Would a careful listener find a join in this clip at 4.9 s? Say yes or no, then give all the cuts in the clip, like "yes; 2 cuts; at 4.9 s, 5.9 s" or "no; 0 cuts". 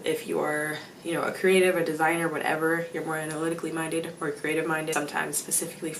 yes; 1 cut; at 4.9 s